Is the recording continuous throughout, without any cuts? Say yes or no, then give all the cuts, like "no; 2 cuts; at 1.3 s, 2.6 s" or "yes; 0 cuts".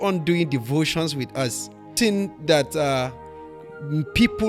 no; 1 cut; at 1.9 s